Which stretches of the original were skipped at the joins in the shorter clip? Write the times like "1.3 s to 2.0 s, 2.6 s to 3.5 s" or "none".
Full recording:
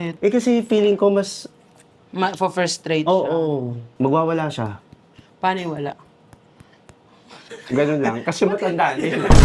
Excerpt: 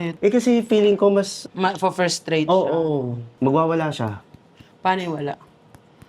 1.4 s to 2.0 s